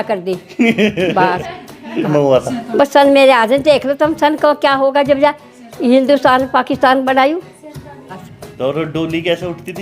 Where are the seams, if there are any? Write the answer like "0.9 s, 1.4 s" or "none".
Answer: 2.1 s, 8.1 s